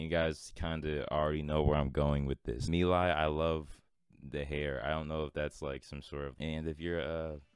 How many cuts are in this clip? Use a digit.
2